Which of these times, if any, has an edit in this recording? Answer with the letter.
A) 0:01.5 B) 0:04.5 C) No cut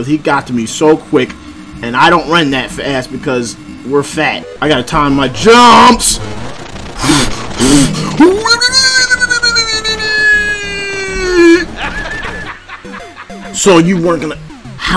B